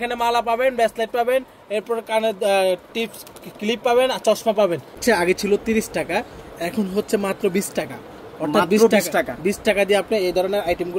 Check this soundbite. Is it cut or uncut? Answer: cut